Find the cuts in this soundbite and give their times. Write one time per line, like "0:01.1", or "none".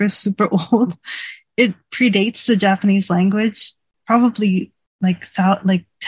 0:03.9